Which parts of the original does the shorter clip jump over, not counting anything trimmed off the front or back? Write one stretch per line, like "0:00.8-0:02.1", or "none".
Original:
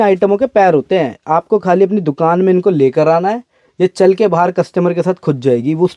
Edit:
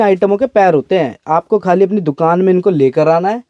none

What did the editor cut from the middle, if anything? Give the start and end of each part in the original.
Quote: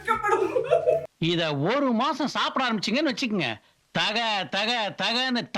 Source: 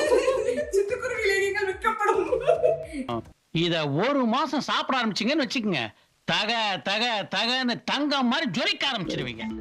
0:02.9-0:03.4

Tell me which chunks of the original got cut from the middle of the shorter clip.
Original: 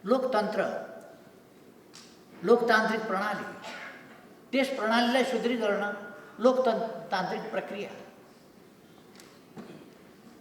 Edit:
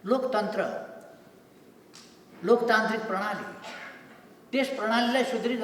none

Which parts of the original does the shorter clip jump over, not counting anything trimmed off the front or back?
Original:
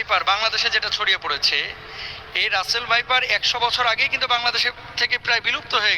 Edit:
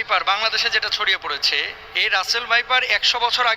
0:01.8-0:02.2

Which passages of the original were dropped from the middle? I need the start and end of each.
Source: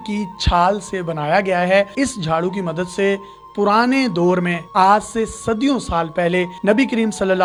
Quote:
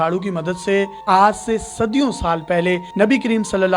0:03.3-0:04.6

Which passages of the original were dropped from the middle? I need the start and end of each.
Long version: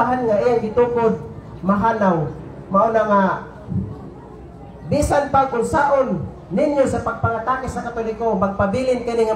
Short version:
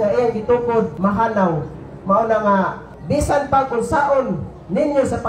0:01.2-0:01.6
0:03.5-0:04.7

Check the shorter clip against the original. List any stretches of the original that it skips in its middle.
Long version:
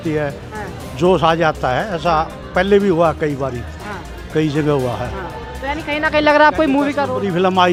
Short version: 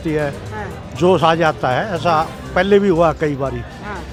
none

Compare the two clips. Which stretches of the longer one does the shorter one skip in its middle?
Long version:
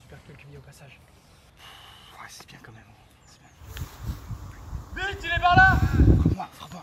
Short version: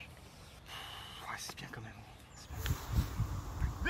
0:03.4-0:03.6

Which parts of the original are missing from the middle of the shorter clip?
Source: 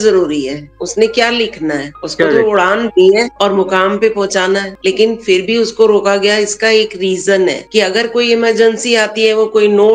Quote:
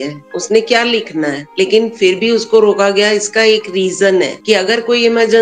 0:01.9-0:04.7

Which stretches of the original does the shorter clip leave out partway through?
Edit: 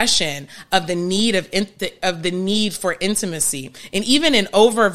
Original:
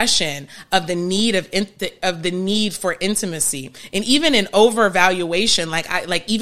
none

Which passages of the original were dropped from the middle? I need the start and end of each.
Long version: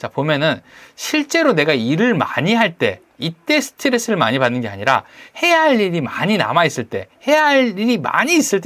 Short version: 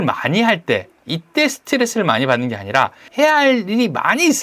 0:05.1-0:07.1

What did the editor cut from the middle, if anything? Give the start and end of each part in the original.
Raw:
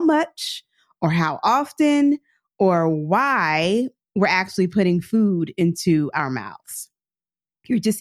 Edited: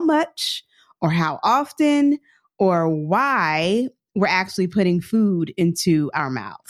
none

